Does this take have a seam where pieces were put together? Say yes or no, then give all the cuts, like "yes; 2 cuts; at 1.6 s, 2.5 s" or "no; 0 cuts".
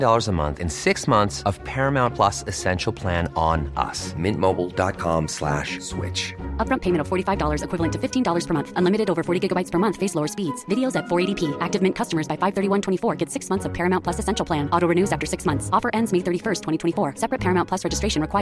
no; 0 cuts